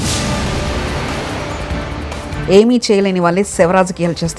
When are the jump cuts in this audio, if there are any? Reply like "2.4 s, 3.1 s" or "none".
2.3 s